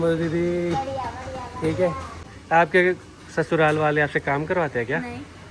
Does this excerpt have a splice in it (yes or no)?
yes